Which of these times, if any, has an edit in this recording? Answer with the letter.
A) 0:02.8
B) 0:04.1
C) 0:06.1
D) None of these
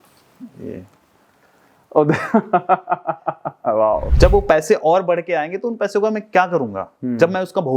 B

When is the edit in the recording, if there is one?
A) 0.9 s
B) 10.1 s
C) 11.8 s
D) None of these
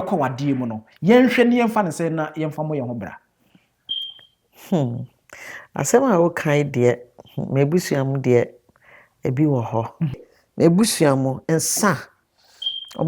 B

